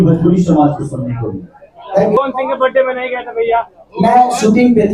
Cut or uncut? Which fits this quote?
cut